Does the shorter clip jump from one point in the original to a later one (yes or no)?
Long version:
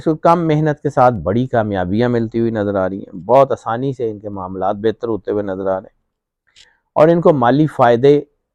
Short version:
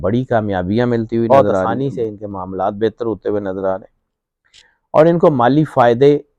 yes